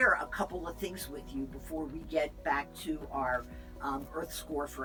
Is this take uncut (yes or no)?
yes